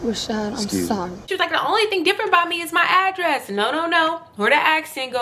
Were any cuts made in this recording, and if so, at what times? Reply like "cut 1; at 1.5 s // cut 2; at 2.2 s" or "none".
cut 1; at 1.3 s